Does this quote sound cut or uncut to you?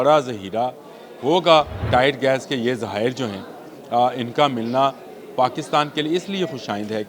cut